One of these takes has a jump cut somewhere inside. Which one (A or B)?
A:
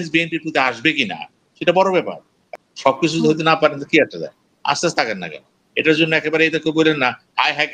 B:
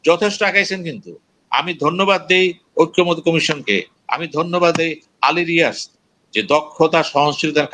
A